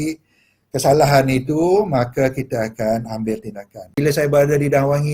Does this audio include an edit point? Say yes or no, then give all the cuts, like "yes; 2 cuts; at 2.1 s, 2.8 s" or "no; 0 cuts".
yes; 1 cut; at 4.0 s